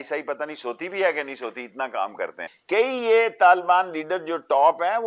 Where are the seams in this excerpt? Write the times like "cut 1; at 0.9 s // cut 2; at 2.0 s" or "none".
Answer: cut 1; at 2.5 s